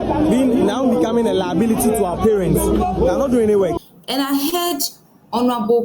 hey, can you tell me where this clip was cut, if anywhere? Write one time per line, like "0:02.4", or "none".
0:03.8